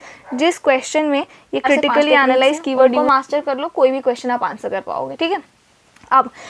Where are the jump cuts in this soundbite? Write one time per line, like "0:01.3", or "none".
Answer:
0:03.0